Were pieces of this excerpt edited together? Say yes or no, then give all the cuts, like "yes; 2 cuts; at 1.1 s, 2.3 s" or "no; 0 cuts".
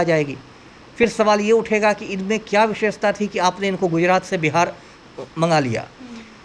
no; 0 cuts